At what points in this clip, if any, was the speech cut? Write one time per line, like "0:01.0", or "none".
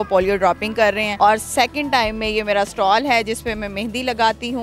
0:01.1